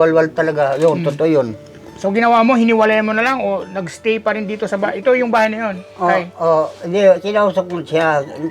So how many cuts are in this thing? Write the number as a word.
zero